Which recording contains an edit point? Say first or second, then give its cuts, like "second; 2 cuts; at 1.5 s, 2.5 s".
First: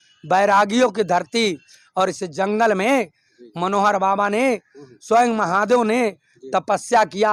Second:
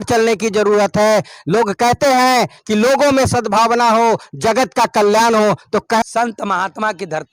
second; 1 cut; at 6.0 s